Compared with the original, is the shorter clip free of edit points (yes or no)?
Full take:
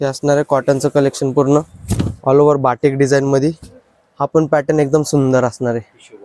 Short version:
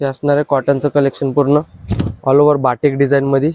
yes